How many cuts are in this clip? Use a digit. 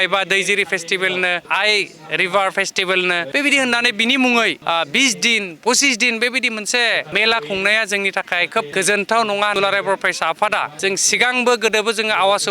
7